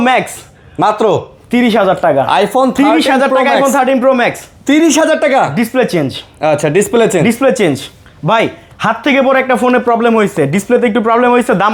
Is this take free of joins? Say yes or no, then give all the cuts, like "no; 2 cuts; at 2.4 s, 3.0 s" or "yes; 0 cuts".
yes; 0 cuts